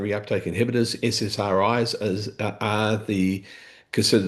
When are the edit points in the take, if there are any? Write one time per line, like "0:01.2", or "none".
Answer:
none